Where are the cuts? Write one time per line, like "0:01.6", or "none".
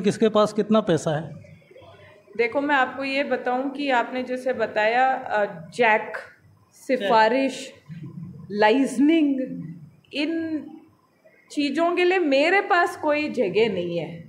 none